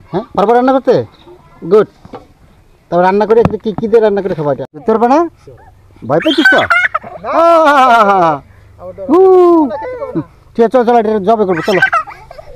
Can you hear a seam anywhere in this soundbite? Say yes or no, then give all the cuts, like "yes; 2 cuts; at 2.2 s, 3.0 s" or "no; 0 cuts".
yes; 1 cut; at 4.7 s